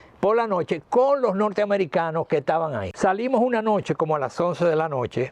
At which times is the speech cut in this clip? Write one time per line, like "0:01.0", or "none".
0:02.9